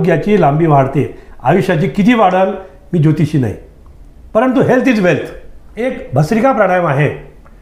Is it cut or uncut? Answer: cut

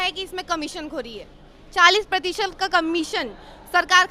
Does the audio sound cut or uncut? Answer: uncut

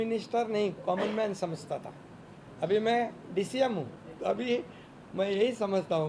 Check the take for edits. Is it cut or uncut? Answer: cut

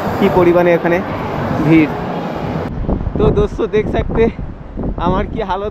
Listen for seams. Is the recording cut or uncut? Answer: cut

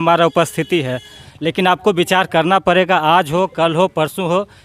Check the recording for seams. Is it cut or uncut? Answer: cut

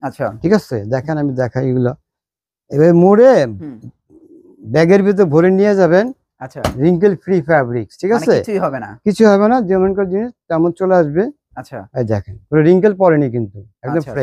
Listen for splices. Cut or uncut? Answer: uncut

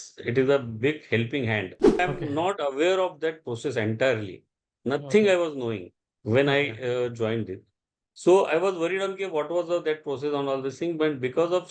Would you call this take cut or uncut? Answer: cut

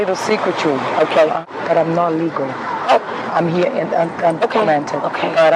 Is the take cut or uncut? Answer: cut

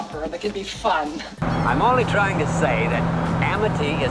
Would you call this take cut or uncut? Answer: cut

